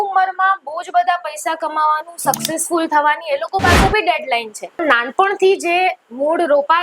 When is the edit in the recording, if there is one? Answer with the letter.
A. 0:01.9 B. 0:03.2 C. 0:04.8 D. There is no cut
C